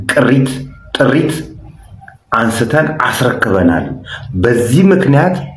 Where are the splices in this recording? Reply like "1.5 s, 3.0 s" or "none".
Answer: none

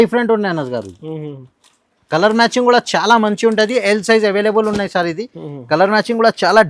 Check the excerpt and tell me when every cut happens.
none

